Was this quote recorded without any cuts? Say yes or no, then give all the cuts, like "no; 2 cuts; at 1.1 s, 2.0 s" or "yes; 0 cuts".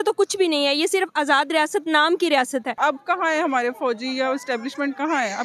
no; 1 cut; at 2.7 s